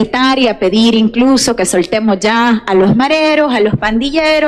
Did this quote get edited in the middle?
no; 0 cuts

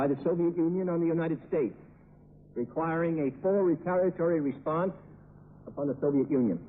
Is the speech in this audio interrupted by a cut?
no; 0 cuts

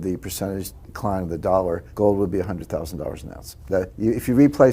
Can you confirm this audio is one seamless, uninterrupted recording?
no; 3 cuts; at 0.9 s, 1.9 s, 3.8 s

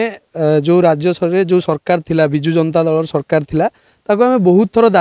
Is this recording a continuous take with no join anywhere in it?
yes; 0 cuts

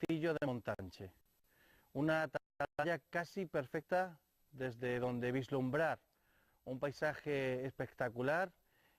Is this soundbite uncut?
no; 1 cut; at 6.8 s

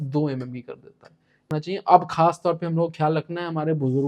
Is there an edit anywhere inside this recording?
yes; 1 cut; at 1.5 s

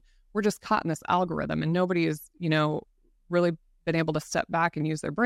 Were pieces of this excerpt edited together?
no; 0 cuts

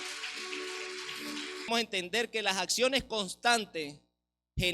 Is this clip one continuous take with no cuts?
no; 1 cut; at 1.7 s

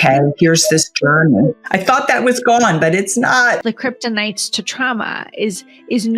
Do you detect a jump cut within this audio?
yes; 2 cuts; at 1.6 s, 3.6 s

